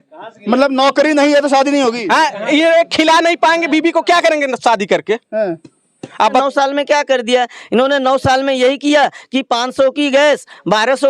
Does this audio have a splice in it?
yes; 1 cut; at 6.4 s

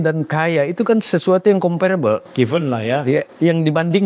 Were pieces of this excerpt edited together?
no; 0 cuts

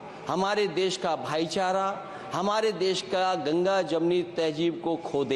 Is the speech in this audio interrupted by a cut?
no; 0 cuts

